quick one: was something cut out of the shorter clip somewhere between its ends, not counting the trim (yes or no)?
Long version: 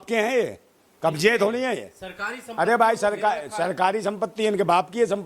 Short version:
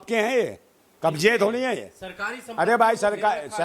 no